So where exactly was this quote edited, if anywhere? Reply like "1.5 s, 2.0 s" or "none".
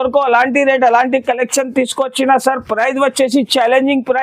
none